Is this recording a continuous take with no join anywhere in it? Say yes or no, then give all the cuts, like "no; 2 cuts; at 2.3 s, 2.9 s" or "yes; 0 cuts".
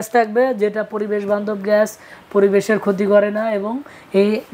yes; 0 cuts